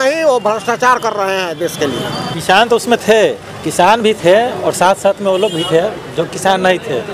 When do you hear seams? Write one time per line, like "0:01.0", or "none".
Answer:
0:02.3